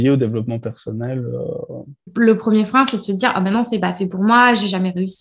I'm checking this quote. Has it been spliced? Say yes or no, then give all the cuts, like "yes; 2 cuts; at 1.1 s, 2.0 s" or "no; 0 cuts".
yes; 1 cut; at 2.1 s